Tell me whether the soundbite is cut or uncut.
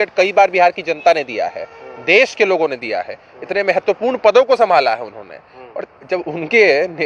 uncut